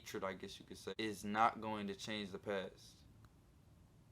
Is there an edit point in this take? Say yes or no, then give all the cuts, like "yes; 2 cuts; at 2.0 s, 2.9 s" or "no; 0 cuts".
yes; 1 cut; at 0.9 s